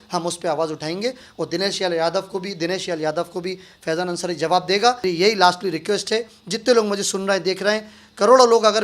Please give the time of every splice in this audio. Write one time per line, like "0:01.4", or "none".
0:05.0